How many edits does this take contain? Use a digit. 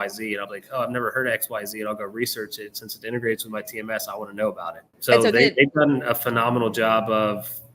1